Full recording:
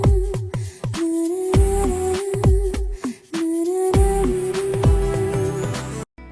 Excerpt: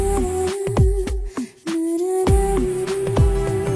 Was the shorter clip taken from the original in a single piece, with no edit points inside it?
yes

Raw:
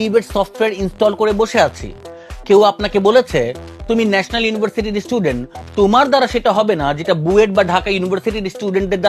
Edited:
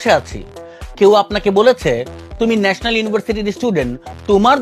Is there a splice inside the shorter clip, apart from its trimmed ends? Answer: no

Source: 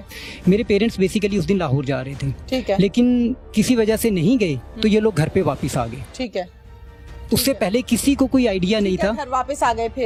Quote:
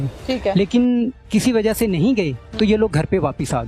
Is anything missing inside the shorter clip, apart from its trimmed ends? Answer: no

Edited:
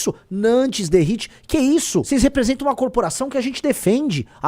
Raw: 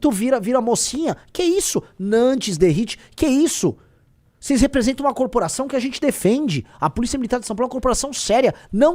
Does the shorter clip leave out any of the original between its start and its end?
yes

